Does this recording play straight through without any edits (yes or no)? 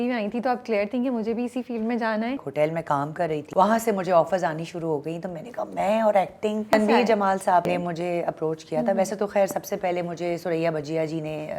no